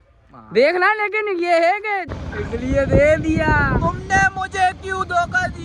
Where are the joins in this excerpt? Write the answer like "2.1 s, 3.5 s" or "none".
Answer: 2.2 s